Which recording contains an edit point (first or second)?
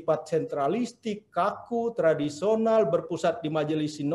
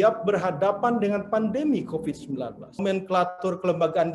second